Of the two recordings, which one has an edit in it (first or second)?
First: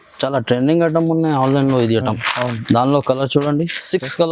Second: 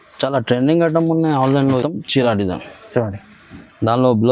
second